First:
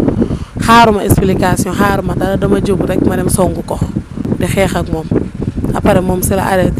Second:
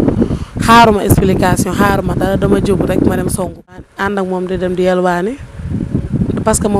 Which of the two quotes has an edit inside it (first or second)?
second